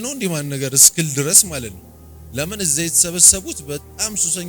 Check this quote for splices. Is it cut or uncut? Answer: uncut